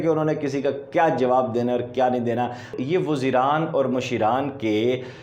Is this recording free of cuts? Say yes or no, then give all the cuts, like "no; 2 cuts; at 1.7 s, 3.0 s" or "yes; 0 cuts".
no; 1 cut; at 2.7 s